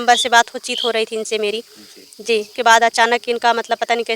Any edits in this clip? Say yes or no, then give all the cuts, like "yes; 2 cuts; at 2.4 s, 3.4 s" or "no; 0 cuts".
yes; 1 cut; at 2.5 s